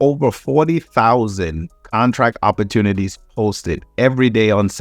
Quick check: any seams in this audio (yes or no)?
no